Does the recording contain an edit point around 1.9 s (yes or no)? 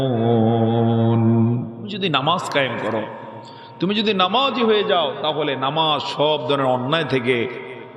yes